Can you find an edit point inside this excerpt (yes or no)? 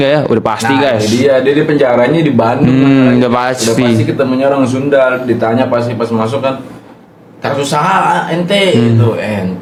no